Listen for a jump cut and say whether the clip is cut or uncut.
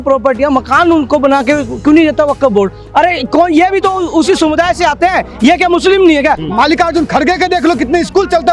cut